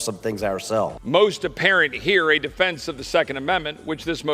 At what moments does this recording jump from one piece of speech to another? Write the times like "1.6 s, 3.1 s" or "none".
1.0 s